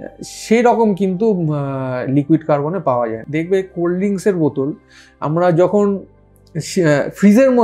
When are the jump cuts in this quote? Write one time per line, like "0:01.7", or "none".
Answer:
0:03.2